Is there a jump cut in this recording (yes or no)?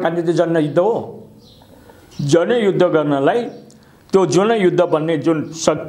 no